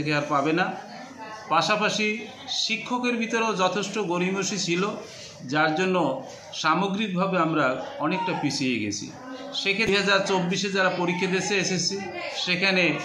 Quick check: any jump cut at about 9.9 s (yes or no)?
yes